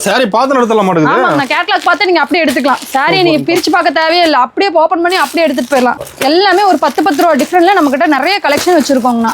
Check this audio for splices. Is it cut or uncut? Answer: cut